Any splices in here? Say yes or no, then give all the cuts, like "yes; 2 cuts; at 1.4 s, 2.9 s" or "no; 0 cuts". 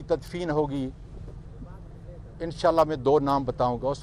no; 0 cuts